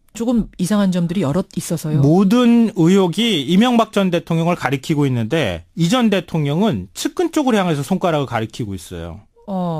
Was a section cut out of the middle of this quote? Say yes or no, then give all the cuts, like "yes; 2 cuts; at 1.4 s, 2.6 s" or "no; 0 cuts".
no; 0 cuts